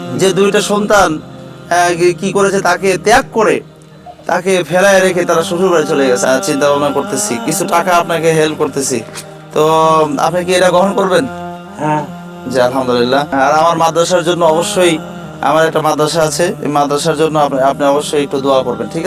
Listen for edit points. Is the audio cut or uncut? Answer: cut